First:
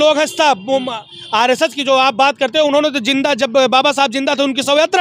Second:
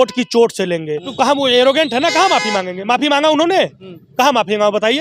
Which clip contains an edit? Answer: second; 1 cut; at 1.1 s

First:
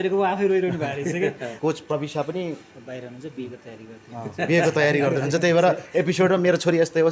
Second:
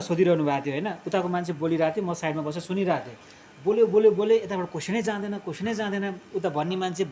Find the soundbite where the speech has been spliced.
first; 1 cut; at 1.6 s

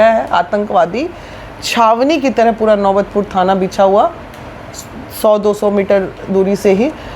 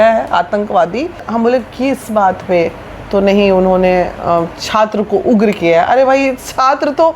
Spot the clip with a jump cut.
second; 1 cut; at 1.3 s

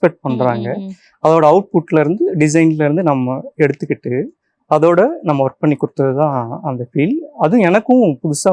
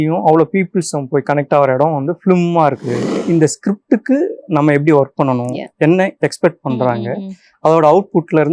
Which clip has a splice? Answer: second; 1 cut; at 3.2 s

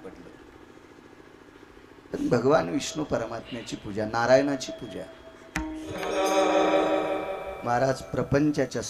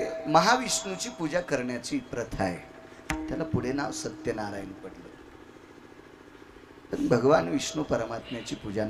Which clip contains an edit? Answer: first; 1 cut; at 6.1 s

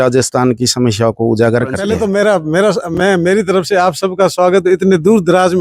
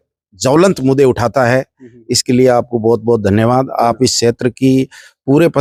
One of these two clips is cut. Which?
first; 1 cut; at 1.9 s

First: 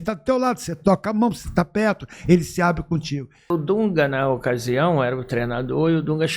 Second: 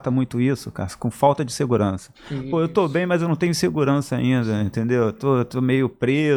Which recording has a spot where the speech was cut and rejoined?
first; 1 cut; at 3.5 s

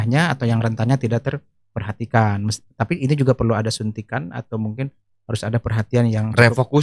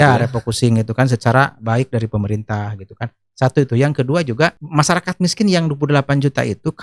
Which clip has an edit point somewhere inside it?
second; 1 cut; at 4.6 s

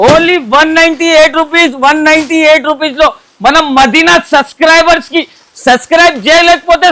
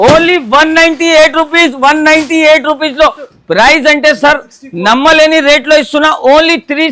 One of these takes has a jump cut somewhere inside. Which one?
second; 1 cut; at 3.3 s

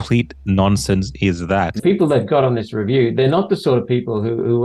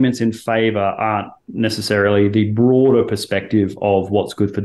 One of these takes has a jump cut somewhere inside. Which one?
first; 1 cut; at 1.8 s

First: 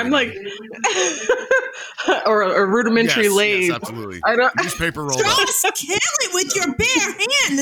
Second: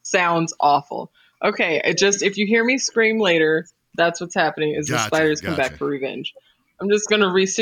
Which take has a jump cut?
first; 1 cut; at 5.2 s

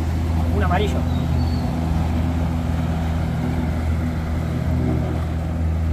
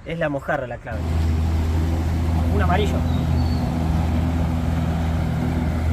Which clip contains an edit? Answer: second; 1 cut; at 1.0 s

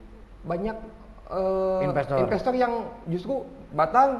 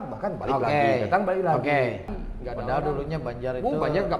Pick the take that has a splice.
second; 1 cut; at 2.2 s

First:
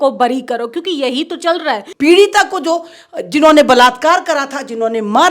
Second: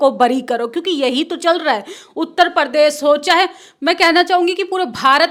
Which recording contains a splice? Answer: first; 1 cut; at 1.8 s

